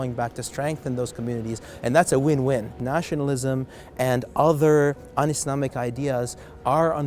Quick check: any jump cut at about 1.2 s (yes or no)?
no